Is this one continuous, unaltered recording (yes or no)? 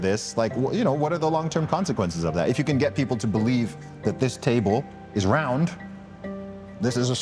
yes